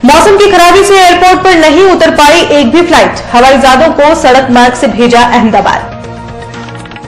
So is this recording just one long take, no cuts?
no; 1 cut; at 5.8 s

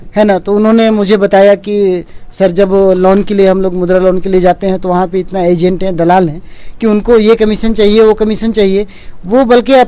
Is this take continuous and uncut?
yes; 0 cuts

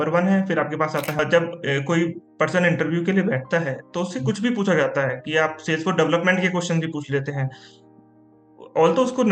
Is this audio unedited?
no; 1 cut; at 1.2 s

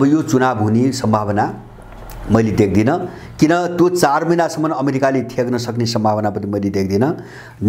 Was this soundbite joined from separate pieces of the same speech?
no; 0 cuts

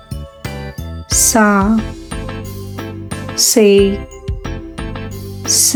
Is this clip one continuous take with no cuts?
yes; 0 cuts

